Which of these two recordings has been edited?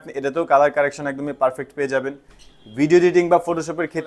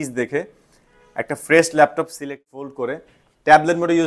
second; 1 cut; at 2.3 s

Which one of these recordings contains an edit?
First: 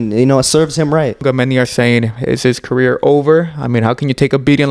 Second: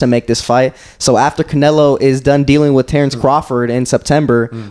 first; 1 cut; at 1.2 s

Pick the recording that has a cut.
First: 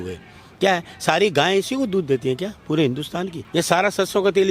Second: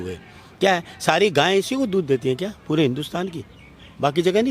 first; 1 cut; at 3.4 s

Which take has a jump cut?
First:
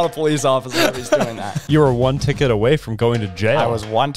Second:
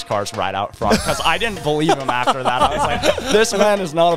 first; 1 cut; at 1.6 s

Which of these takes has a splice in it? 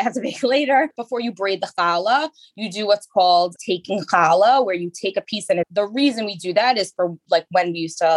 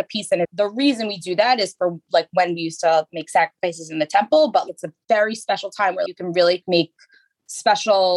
second; 1 cut; at 4.6 s

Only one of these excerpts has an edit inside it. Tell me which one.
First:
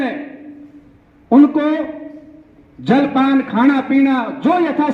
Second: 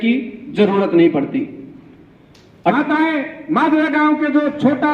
second; 1 cut; at 2.7 s

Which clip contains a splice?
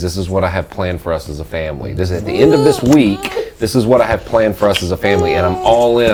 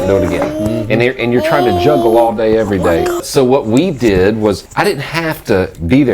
second; 2 cuts; at 3.2 s, 4.7 s

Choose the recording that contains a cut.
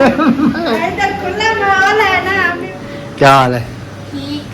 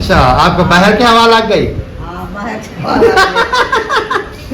first; 1 cut; at 2.6 s

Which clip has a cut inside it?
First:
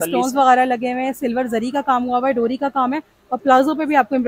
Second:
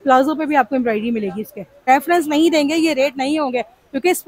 second; 1 cut; at 1.8 s

